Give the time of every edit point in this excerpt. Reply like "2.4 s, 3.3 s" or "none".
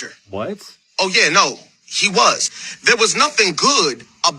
none